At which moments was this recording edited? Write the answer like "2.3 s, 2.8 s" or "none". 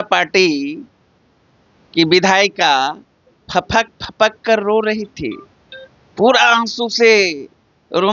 none